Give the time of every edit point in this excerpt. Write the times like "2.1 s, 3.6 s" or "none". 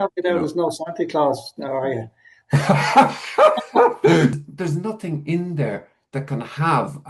4.4 s